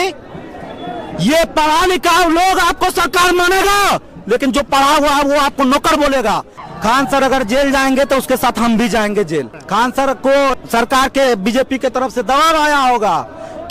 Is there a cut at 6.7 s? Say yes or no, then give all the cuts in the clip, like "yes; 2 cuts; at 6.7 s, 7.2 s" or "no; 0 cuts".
yes; 3 cuts; at 6.7 s, 9.6 s, 10.6 s